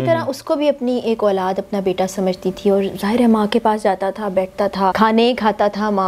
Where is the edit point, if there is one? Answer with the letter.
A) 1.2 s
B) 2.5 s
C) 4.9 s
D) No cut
C